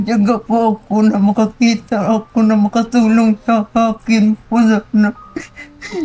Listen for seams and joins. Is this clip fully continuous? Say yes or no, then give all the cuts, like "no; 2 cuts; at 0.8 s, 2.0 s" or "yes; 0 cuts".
yes; 0 cuts